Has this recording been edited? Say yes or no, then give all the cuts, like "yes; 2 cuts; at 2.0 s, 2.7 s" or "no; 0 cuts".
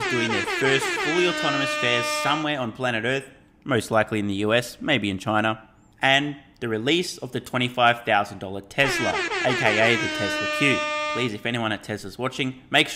no; 0 cuts